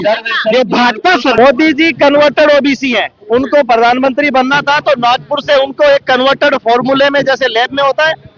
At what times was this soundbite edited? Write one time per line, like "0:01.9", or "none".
0:01.3